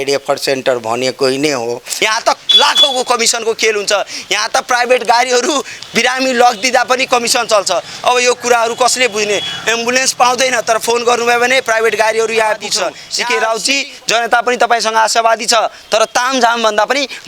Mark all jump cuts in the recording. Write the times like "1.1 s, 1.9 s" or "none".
1.9 s, 13.1 s